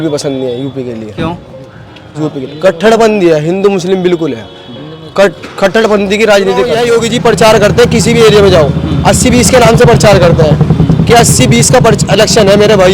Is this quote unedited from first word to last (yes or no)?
no